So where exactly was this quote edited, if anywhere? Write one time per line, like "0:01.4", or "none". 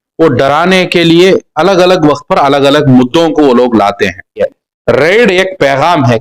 0:04.6